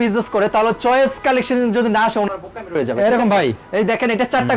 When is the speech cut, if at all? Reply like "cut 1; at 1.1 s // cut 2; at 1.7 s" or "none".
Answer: none